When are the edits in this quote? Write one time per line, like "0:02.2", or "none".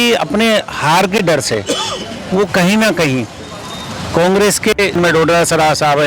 0:05.0